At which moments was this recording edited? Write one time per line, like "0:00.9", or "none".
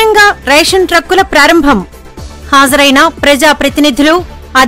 none